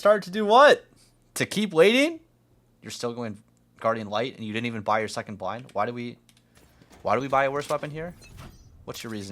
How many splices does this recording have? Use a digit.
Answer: 1